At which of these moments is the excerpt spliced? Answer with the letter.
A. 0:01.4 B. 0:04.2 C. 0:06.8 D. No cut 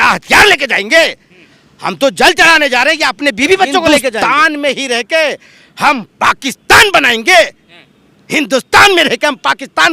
B